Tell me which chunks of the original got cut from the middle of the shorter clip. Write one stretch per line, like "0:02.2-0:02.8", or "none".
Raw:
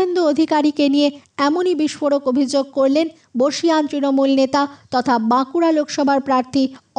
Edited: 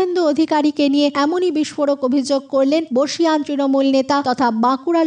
0:01.1-0:01.4
0:03.1-0:03.3
0:04.7-0:04.9